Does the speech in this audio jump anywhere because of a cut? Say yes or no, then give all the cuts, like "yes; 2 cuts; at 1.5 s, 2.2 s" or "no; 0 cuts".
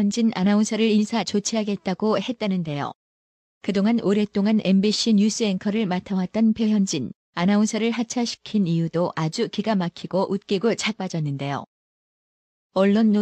no; 0 cuts